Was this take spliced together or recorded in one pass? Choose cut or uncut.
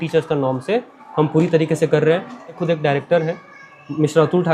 cut